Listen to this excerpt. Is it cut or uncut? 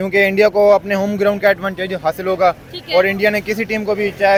uncut